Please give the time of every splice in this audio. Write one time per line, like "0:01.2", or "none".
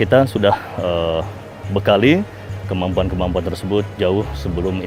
none